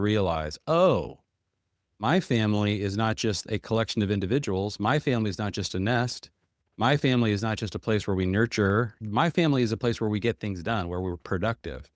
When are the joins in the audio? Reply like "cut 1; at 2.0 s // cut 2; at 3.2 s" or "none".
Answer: cut 1; at 9.0 s